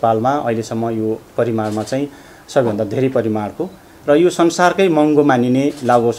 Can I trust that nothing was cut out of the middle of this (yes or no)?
yes